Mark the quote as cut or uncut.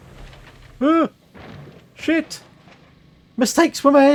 uncut